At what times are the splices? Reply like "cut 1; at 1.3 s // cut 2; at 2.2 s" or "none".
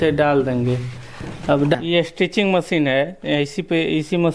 cut 1; at 1.8 s